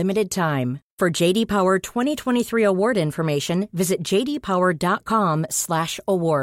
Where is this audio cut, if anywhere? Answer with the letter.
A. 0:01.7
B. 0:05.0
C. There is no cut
C